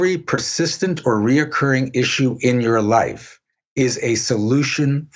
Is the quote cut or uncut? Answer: uncut